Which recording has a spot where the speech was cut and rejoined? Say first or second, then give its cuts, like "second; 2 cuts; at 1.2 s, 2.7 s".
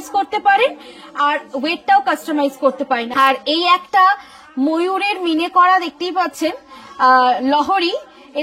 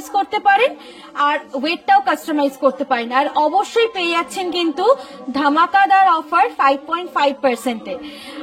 first; 1 cut; at 3.1 s